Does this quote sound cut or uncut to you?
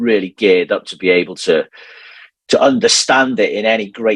uncut